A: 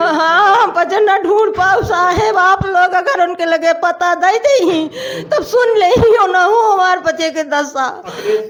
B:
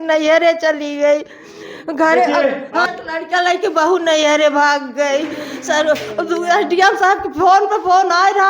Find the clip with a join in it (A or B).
B